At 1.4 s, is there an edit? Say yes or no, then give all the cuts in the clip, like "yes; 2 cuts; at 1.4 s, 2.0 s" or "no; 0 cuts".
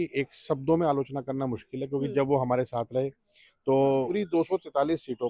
no; 1 cut; at 4.1 s